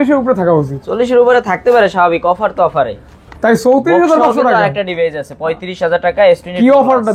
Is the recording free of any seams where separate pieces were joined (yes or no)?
yes